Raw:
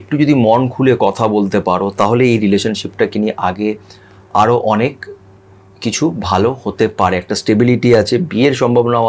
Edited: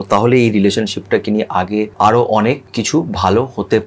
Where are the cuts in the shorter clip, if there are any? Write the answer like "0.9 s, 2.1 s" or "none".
1.9 s, 2.7 s